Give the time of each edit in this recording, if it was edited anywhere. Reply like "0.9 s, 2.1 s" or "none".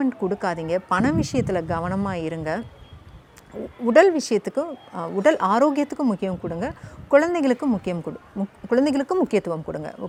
none